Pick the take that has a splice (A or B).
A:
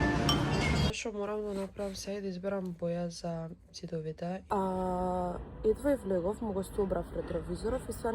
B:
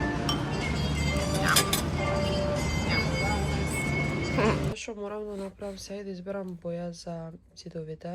A